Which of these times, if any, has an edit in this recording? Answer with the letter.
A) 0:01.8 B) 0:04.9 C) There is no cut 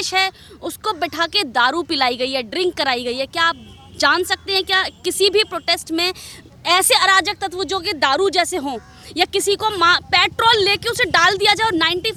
C